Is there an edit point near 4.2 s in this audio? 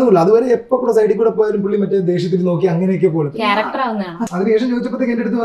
yes; 1 cut; at 4.2 s

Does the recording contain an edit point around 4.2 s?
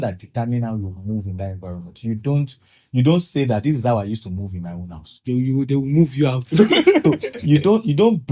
no; 1 cut; at 7.0 s

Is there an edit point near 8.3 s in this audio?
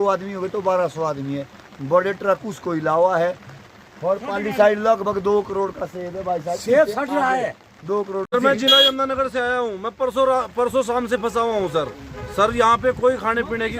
yes; 1 cut; at 8.3 s

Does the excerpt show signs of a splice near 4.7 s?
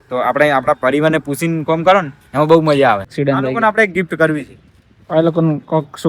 no; 1 cut; at 3.1 s

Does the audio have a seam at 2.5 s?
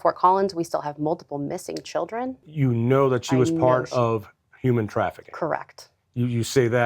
yes; 1 cut; at 2.5 s

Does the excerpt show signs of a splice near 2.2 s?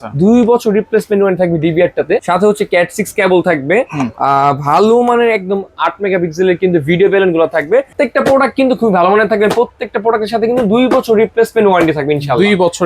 yes; 2 cuts; at 2.2 s, 7.9 s

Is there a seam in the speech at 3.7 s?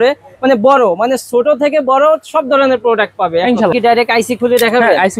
yes; 1 cut; at 3.7 s

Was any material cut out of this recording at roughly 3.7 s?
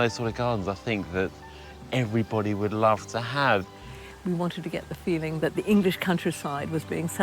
yes; 1 cut; at 3.7 s

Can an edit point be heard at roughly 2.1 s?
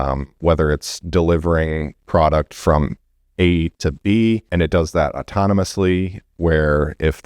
no; 1 cut; at 4.5 s

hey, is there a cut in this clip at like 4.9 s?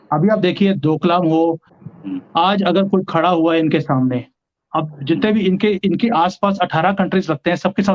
no; 1 cut; at 1.7 s

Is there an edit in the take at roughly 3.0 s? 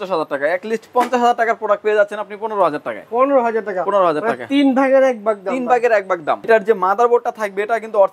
no; 1 cut; at 6.5 s

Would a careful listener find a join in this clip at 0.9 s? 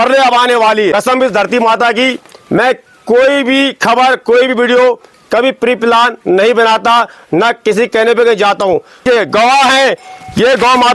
yes; 2 cuts; at 0.9 s, 9.0 s

